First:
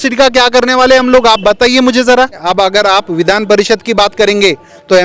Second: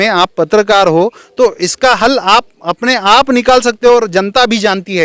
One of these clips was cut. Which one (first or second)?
first